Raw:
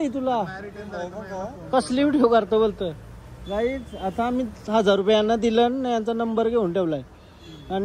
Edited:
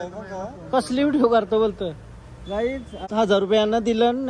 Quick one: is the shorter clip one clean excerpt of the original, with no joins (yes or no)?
no